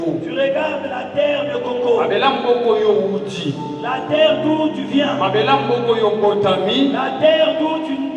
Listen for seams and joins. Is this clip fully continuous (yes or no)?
yes